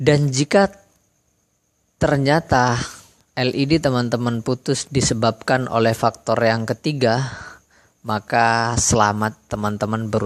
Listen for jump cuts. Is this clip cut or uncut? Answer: uncut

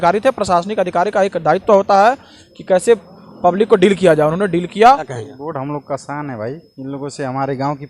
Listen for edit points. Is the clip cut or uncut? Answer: cut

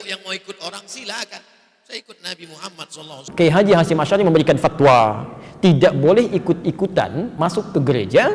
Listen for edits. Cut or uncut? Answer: cut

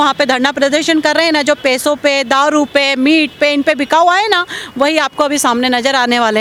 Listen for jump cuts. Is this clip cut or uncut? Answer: uncut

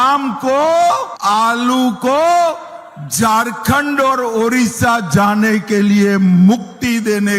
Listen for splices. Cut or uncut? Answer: cut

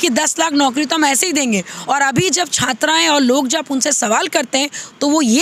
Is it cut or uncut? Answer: uncut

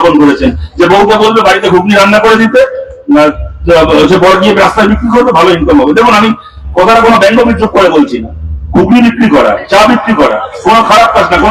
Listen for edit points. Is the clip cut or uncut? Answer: uncut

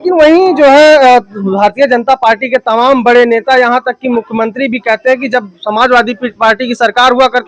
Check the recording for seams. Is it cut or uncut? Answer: uncut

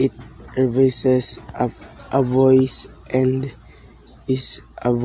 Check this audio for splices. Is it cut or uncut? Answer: cut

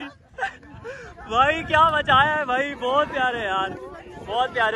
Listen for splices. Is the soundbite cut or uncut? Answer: uncut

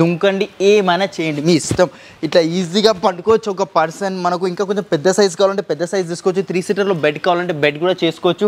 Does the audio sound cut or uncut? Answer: uncut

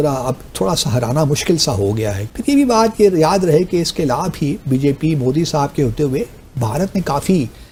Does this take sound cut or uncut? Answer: uncut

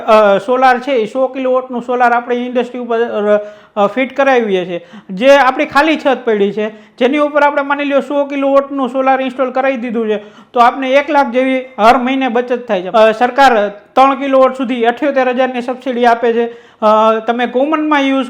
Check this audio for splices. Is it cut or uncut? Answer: cut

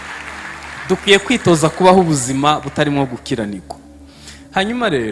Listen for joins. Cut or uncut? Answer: uncut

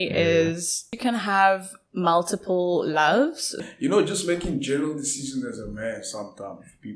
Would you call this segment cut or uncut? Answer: cut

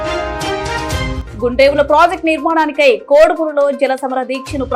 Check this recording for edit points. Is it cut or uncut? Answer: cut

